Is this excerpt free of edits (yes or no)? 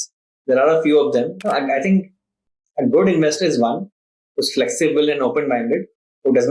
no